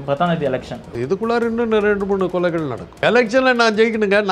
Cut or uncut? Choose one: cut